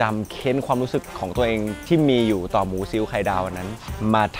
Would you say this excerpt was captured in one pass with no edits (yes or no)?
yes